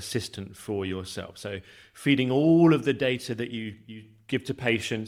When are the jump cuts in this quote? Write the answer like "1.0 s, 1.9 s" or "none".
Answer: none

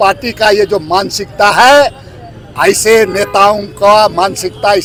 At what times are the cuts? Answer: none

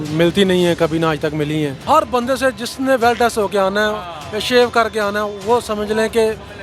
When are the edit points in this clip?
1.8 s

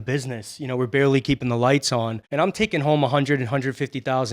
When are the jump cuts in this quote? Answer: 2.2 s

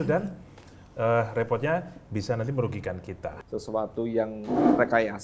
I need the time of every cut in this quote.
3.3 s

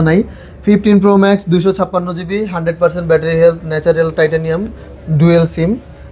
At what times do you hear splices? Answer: none

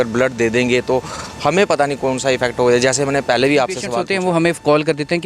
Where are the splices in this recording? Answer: 3.9 s

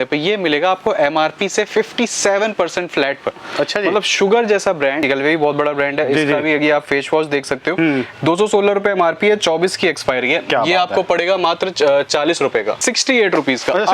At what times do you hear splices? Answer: 5.0 s, 12.8 s

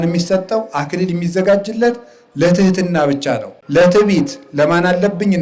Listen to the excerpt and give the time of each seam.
3.5 s

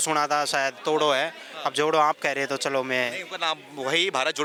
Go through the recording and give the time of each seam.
none

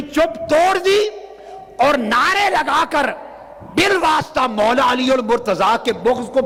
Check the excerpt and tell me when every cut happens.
none

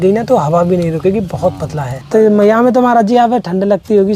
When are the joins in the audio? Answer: 2.1 s

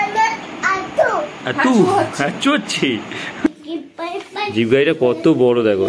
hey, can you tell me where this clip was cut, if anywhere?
3.5 s

